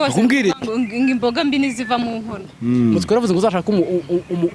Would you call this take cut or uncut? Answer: cut